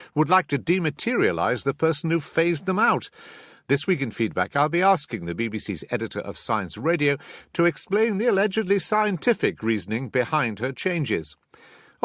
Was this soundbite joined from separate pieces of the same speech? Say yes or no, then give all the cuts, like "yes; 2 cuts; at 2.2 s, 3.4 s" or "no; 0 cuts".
yes; 1 cut; at 6.6 s